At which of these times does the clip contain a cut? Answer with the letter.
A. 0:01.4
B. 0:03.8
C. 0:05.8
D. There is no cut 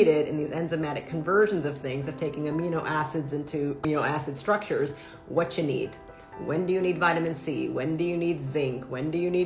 B